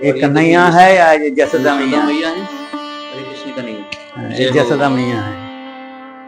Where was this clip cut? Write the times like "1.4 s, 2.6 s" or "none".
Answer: none

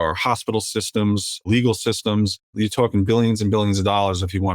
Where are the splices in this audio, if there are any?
1.5 s, 2.5 s

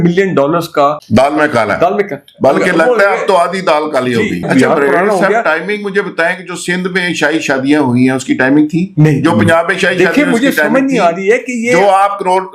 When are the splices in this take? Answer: 1.0 s, 4.4 s

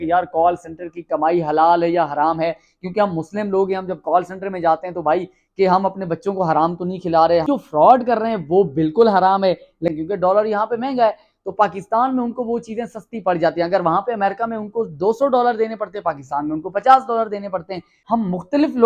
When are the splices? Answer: 7.4 s, 9.9 s, 17.9 s

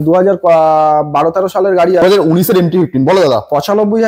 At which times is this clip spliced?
2.0 s

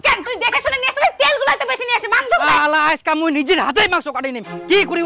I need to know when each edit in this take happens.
2.6 s

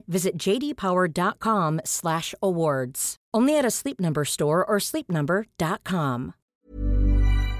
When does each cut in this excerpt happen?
6.3 s

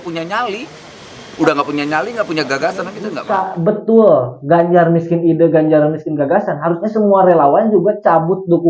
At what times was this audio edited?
3.2 s

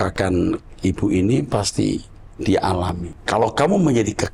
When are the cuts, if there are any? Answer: 3.1 s

